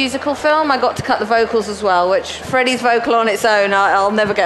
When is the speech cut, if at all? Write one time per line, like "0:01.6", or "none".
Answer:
0:02.4